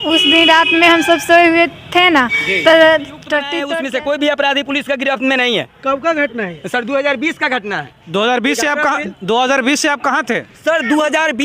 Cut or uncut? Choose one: cut